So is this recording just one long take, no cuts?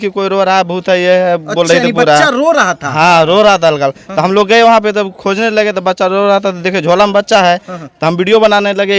yes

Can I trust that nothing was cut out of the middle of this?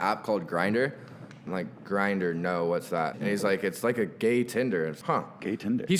no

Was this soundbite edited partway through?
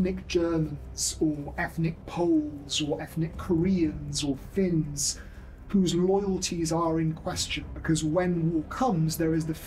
no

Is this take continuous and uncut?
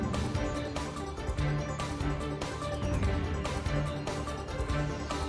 no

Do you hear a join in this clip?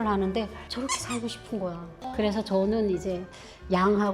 yes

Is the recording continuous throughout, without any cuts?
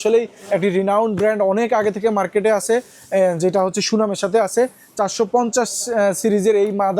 yes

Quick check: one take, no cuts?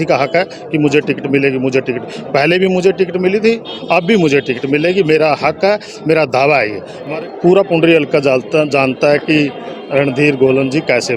no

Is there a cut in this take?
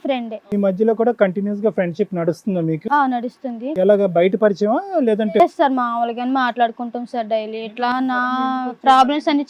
no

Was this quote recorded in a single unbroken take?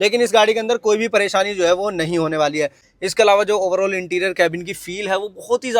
no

